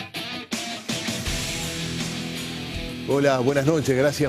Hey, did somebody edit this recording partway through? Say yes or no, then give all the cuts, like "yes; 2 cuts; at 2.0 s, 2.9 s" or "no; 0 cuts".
yes; 2 cuts; at 0.8 s, 3.0 s